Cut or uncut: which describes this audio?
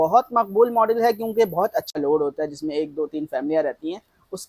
cut